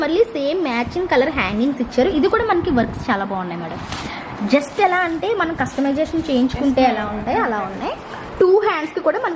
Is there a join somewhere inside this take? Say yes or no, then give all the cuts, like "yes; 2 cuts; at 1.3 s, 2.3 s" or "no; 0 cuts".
no; 0 cuts